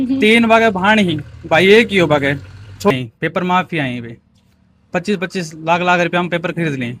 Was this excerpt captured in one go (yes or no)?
no